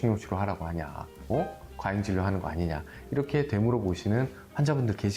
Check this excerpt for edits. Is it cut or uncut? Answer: uncut